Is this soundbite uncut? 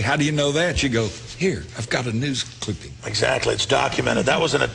yes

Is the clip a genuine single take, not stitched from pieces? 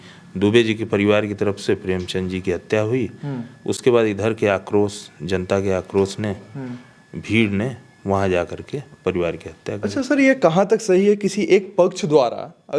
yes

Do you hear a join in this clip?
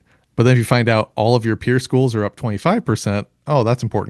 no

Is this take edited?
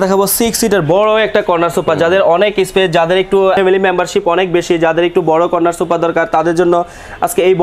no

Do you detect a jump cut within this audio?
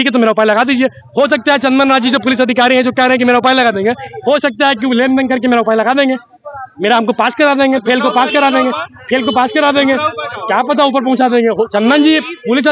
no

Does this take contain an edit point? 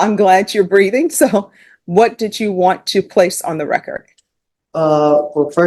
no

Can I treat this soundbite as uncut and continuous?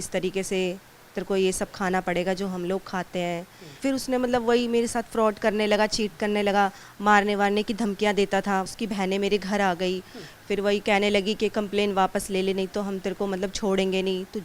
no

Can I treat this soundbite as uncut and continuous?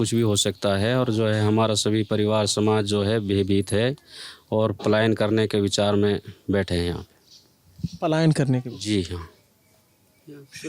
yes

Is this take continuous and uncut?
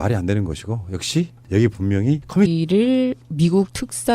yes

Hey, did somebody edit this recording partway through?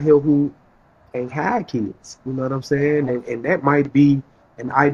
no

